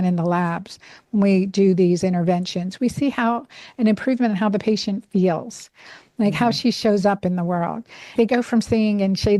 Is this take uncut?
no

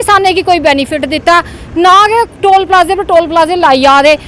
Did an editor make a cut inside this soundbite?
no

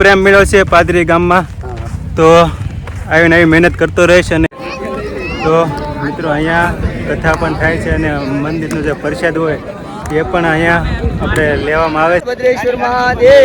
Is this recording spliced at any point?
yes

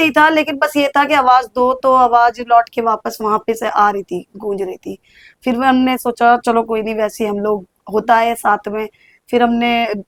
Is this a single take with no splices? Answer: yes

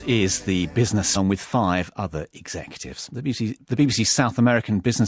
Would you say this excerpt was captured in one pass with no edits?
yes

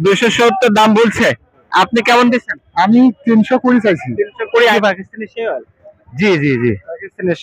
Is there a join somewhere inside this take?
yes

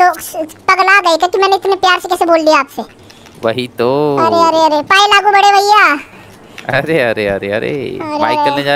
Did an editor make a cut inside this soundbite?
no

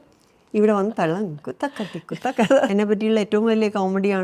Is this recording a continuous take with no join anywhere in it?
no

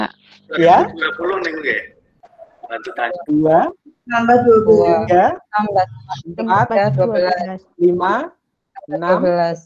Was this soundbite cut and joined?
yes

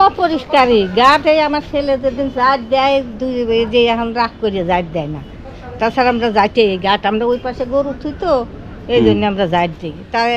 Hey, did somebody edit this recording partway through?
no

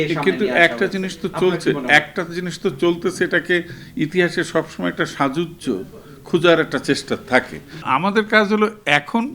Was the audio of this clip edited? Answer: yes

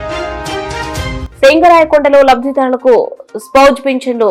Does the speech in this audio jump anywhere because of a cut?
no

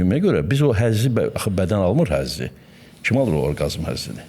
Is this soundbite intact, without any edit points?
yes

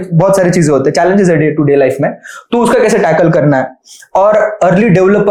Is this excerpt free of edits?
yes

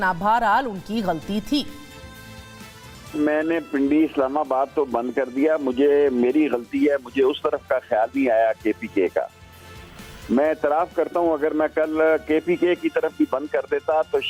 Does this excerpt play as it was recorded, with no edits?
yes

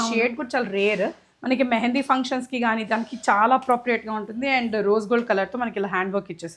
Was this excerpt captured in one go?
yes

